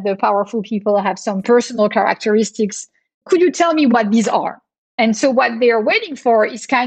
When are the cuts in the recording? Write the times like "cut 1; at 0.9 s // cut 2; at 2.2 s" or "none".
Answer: cut 1; at 3.2 s